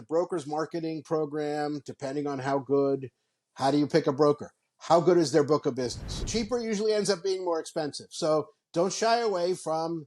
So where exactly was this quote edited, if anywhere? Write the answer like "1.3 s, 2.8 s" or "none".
6.1 s